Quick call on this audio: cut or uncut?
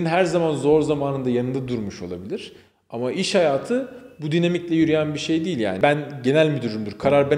cut